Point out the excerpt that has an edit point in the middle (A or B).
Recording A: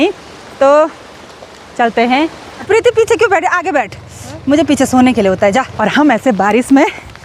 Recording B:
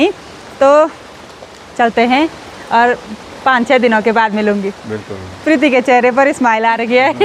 A